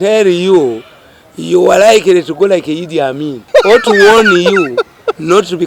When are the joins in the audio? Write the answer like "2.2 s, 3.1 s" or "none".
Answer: 3.3 s